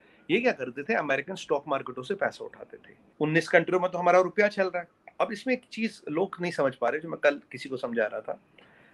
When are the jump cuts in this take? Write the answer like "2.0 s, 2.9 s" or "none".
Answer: 3.0 s